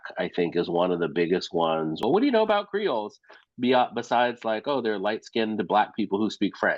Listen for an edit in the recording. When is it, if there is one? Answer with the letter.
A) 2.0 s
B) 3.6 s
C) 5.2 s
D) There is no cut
A